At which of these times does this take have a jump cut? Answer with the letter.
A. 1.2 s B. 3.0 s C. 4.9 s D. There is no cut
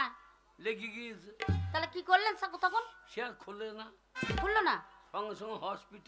D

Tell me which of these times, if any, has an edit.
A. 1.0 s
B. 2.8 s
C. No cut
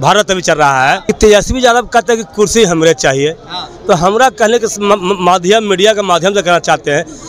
A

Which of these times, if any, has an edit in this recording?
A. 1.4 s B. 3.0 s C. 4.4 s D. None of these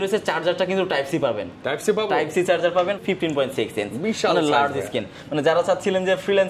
B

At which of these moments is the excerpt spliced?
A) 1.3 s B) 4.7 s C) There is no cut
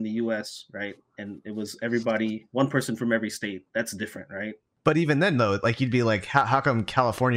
B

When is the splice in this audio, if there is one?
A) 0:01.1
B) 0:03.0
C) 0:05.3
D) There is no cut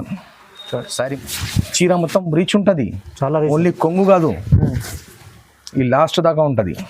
A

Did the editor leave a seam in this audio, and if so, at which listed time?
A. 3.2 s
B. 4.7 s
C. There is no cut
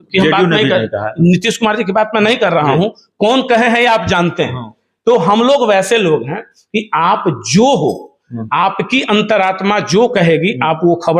C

